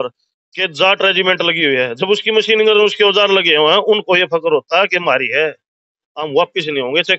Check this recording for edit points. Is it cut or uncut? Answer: uncut